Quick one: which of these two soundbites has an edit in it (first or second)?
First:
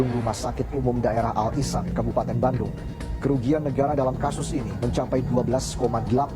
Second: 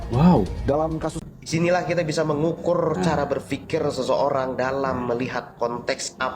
second